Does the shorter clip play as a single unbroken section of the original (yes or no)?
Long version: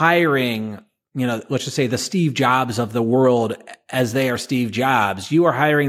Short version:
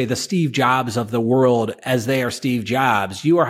no